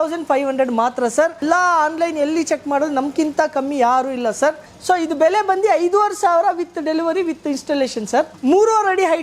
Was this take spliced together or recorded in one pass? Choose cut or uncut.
cut